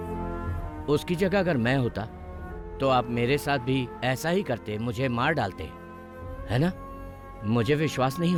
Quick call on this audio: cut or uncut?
uncut